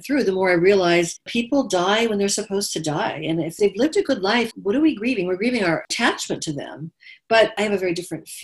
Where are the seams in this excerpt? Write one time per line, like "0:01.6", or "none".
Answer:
0:01.3
0:03.6
0:04.5
0:05.9
0:07.6